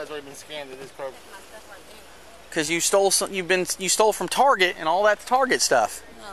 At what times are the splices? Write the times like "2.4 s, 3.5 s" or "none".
1.2 s